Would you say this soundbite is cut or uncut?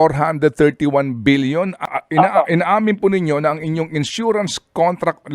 cut